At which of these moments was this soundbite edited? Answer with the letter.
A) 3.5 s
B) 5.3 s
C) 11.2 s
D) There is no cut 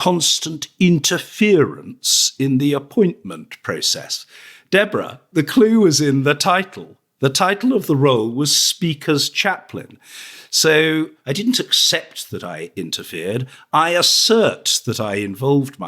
C